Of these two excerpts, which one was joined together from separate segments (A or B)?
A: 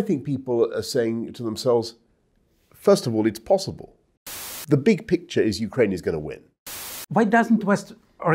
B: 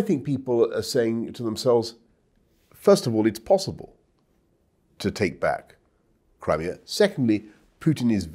A